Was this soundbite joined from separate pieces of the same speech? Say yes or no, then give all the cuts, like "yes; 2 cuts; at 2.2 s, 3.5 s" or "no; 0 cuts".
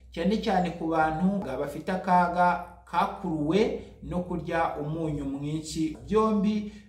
yes; 2 cuts; at 1.5 s, 6.0 s